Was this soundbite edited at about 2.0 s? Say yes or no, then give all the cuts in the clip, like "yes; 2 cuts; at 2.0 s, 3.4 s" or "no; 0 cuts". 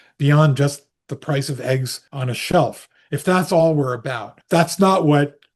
yes; 2 cuts; at 2.0 s, 4.3 s